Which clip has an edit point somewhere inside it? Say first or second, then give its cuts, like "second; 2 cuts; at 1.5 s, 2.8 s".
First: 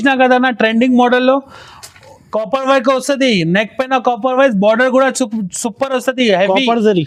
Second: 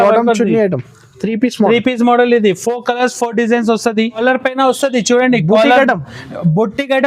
second; 1 cut; at 4.2 s